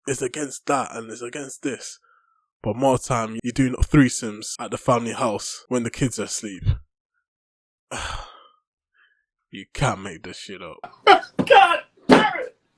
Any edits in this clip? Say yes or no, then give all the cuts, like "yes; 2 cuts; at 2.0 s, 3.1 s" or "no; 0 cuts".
no; 0 cuts